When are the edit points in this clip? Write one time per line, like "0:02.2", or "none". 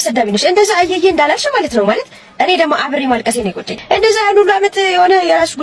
0:03.7

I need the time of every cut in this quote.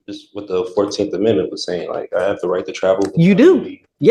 none

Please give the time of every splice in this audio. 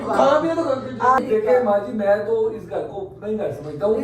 0:01.2

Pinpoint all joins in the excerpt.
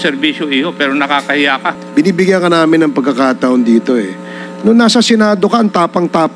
0:01.8

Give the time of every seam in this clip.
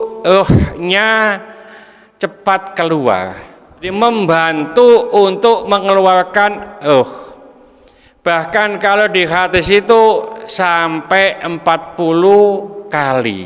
0:03.9

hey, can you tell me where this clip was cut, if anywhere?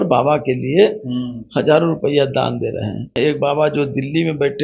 0:03.1

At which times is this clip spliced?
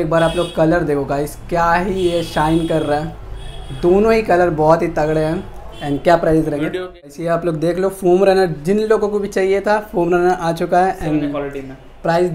0:07.1

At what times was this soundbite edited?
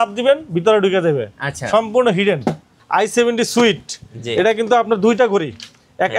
0:02.7

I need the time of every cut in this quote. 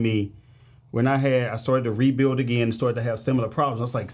none

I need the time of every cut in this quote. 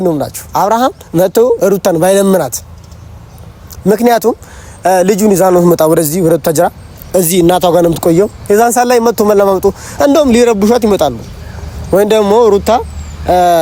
none

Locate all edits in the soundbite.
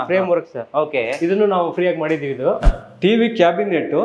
0:02.6

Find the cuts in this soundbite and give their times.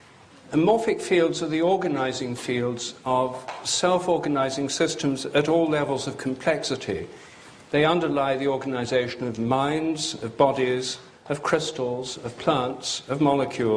none

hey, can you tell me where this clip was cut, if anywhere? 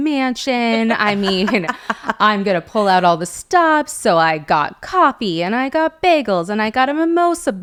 none

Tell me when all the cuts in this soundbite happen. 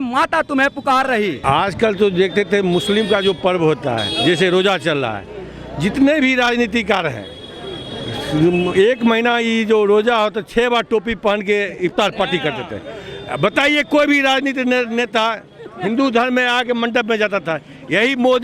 0:01.4

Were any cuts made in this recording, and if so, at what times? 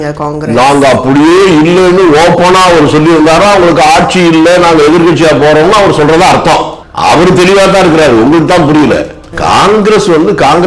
0:06.8
0:09.3

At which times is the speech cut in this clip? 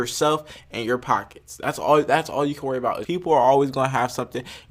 0:03.0

